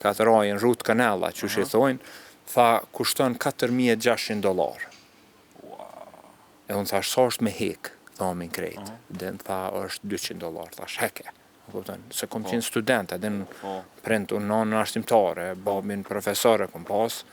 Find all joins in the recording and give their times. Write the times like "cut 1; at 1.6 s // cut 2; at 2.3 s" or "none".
none